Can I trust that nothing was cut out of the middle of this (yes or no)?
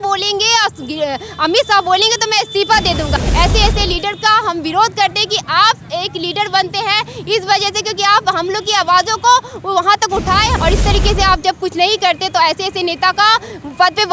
no